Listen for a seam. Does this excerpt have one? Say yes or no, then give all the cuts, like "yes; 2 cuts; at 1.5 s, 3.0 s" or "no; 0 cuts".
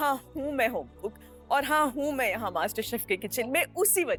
no; 0 cuts